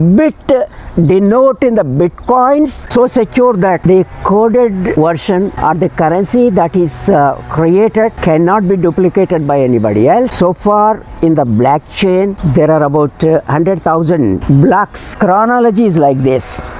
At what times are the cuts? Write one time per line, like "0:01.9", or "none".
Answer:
0:02.8
0:10.3
0:15.0

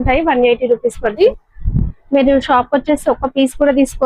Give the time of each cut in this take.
0:01.2

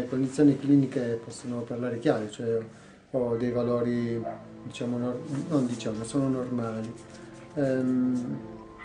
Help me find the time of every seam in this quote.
0:04.0

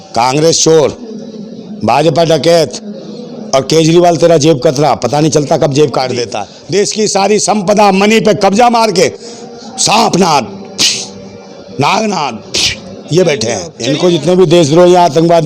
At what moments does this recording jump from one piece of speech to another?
0:06.3
0:13.7

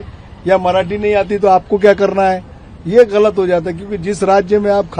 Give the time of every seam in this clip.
none

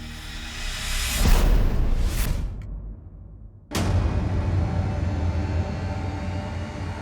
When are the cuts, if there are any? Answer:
0:02.4

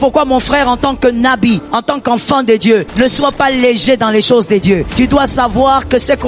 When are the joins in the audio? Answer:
0:01.7
0:02.9
0:04.9

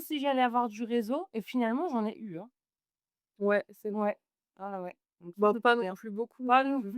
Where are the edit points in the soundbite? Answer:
none

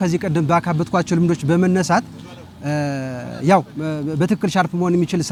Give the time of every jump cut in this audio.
none

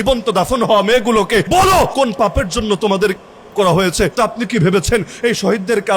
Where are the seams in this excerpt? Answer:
0:01.7
0:04.1

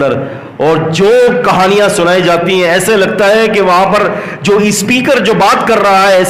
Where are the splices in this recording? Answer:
none

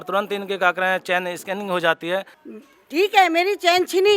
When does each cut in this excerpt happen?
0:02.3

